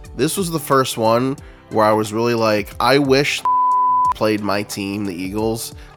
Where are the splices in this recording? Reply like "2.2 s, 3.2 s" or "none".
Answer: none